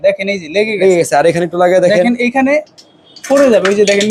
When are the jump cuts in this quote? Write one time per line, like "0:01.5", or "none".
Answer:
none